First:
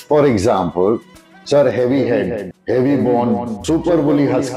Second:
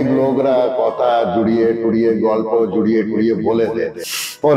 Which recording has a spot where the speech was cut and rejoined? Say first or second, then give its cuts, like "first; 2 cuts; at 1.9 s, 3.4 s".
first; 2 cuts; at 2.5 s, 3.6 s